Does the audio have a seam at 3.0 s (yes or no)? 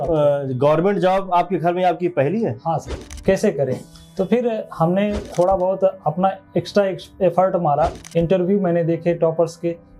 yes